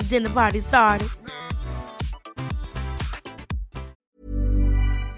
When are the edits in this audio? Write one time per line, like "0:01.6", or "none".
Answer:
0:04.0